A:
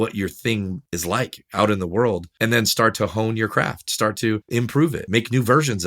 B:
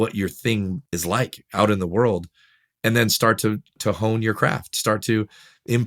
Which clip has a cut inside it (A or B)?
A